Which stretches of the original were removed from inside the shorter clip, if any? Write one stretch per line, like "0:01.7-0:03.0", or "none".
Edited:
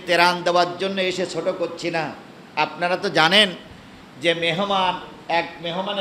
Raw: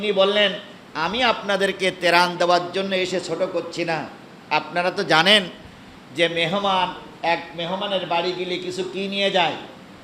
none